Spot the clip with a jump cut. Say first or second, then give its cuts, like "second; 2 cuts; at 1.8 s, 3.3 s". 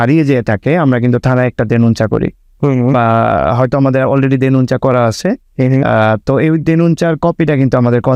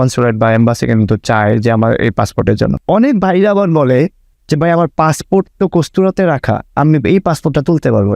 second; 1 cut; at 2.8 s